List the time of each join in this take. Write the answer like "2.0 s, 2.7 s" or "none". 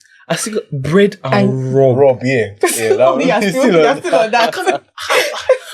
none